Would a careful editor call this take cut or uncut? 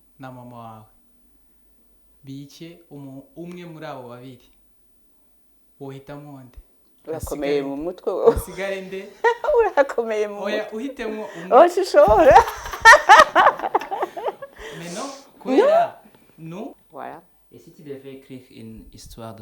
cut